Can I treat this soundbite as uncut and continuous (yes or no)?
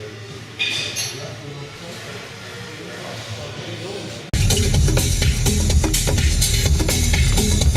yes